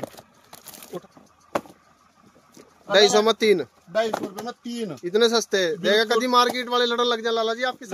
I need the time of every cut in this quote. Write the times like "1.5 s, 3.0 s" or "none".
1.0 s